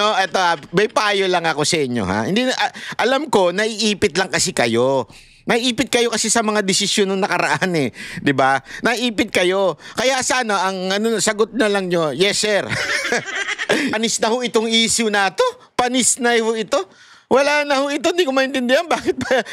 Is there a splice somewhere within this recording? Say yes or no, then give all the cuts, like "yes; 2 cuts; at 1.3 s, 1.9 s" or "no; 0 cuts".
yes; 1 cut; at 13.9 s